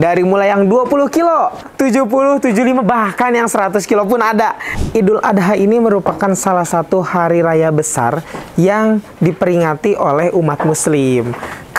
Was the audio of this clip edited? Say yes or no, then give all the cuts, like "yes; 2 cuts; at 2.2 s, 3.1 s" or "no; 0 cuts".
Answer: yes; 2 cuts; at 1.6 s, 4.7 s